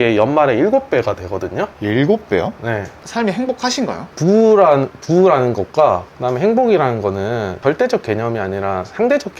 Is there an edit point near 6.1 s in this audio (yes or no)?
no